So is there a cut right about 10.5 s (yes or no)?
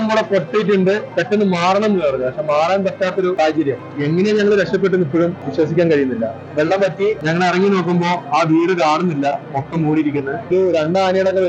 yes